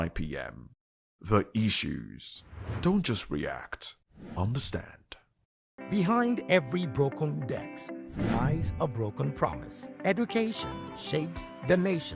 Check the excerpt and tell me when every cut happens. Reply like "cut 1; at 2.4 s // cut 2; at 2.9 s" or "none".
cut 1; at 5.6 s